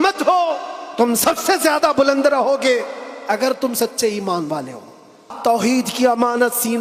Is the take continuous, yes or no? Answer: no